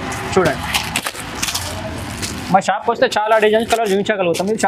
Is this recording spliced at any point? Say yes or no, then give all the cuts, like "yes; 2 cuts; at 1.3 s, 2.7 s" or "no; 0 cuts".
no; 0 cuts